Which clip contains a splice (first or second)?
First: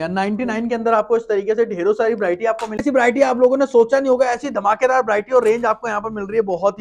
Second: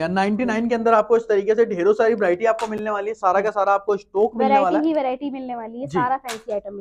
first